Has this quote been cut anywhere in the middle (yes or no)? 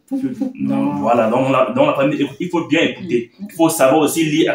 no